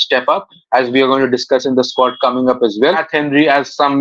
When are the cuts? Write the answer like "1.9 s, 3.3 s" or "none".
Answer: 3.0 s